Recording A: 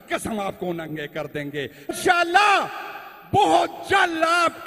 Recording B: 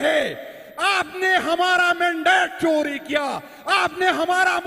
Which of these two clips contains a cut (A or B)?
A